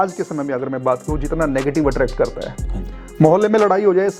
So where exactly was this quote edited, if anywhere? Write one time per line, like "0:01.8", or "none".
none